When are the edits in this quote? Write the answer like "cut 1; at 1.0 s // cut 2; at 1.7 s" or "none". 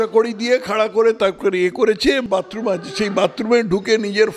cut 1; at 2.2 s